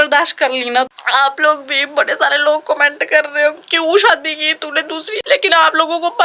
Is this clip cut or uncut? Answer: cut